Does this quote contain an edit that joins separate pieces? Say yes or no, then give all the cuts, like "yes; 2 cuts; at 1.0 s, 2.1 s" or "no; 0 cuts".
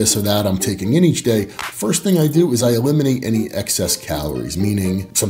no; 0 cuts